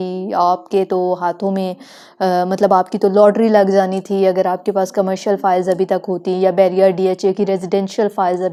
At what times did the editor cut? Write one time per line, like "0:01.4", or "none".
none